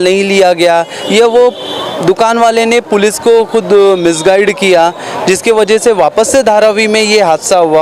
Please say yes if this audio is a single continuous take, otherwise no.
yes